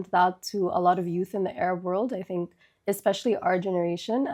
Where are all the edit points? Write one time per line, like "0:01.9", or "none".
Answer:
none